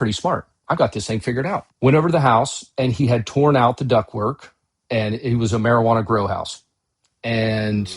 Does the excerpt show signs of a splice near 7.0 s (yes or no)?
no